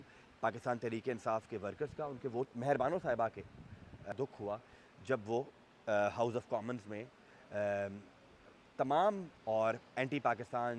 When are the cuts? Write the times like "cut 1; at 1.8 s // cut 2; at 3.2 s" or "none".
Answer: cut 1; at 2.4 s // cut 2; at 4.1 s // cut 3; at 9.3 s